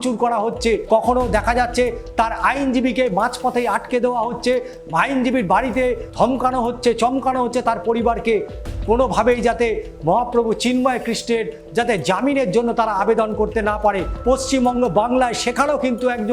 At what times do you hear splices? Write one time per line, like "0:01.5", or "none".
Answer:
0:00.8
0:06.0
0:14.1